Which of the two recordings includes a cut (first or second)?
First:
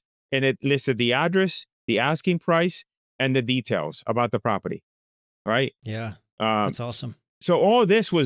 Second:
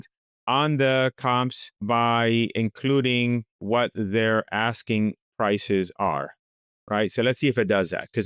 second